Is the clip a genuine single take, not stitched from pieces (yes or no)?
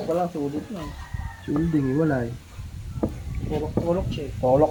yes